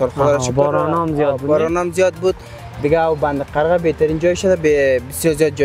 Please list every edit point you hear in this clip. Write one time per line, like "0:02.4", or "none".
none